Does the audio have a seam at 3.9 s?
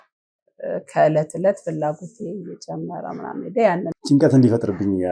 yes; 1 cut; at 3.9 s

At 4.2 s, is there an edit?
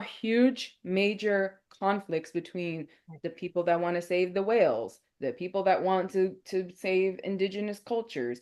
no; 0 cuts

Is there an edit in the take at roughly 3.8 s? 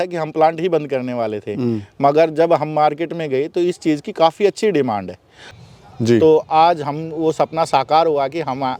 no; 1 cut; at 5.5 s

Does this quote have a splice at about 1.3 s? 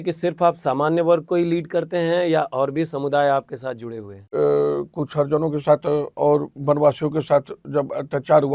no; 1 cut; at 4.3 s

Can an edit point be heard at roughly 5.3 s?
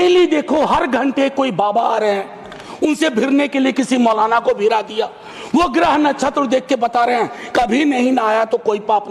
no; 0 cuts

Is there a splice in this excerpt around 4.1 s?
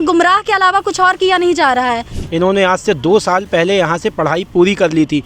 no; 1 cut; at 2.1 s

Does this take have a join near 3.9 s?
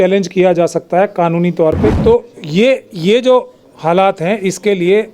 no; 1 cut; at 2.0 s

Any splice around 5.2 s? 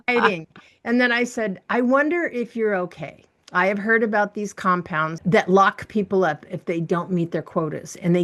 yes; 1 cut; at 5.2 s

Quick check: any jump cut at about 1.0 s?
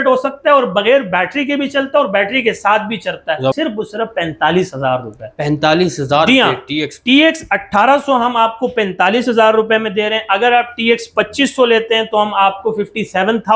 no; 1 cut; at 3.6 s

